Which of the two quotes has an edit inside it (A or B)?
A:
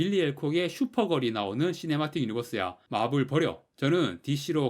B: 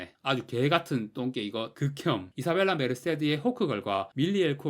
B